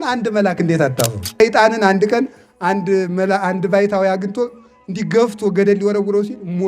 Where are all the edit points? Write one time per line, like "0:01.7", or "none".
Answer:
0:01.4